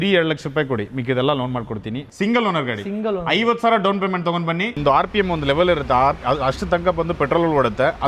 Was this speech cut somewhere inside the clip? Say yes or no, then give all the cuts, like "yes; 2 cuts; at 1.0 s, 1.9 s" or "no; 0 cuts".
yes; 2 cuts; at 2.1 s, 4.8 s